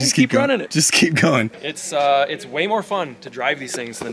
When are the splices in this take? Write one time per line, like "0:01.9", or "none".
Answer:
0:01.6